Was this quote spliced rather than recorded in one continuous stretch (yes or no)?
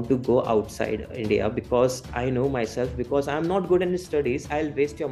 no